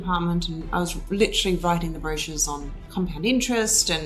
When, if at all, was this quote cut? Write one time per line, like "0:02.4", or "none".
0:02.8